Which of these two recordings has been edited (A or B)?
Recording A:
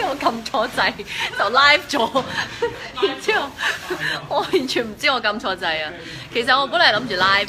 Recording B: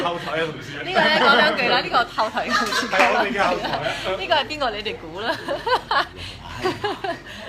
B